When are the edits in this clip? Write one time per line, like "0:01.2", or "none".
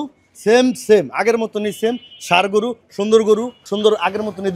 0:03.6

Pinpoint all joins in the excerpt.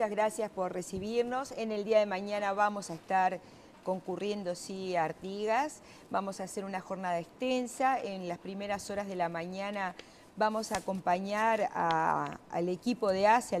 0:08.2

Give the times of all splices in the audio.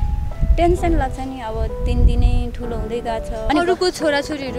0:03.4

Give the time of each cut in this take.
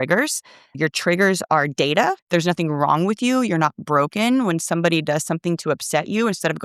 0:02.2

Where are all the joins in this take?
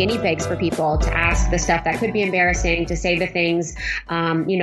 none

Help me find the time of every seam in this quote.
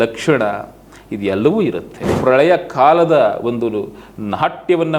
0:02.1

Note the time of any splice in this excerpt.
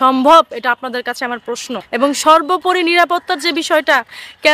0:01.8

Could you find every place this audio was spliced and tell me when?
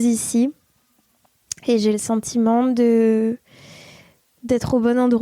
none

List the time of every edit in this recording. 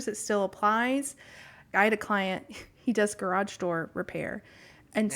0:01.7

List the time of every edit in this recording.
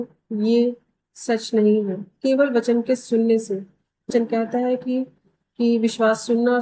0:04.1

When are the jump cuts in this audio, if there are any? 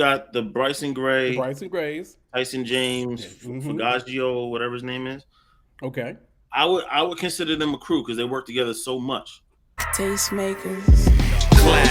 0:09.8

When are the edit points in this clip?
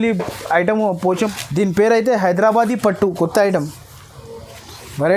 0:01.3

